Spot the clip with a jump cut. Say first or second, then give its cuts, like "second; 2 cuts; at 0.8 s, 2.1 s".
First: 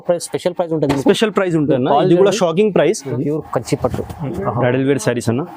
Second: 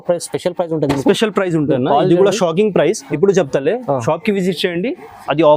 first; 1 cut; at 3.1 s